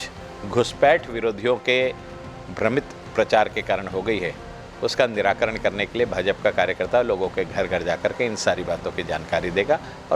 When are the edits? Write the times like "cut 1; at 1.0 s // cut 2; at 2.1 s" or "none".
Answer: none